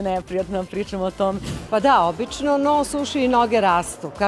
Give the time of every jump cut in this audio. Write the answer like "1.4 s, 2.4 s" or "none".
1.5 s